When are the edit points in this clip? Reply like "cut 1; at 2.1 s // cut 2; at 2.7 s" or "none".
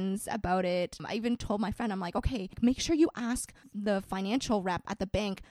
cut 1; at 1.0 s // cut 2; at 2.5 s